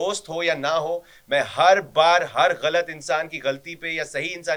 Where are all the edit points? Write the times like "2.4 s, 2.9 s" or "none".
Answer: none